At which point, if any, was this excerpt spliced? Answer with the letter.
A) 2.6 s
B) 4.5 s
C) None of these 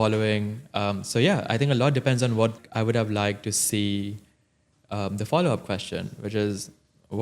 A